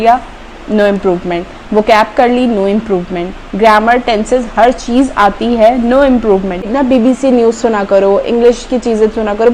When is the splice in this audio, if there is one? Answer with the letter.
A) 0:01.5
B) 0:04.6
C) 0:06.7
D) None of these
C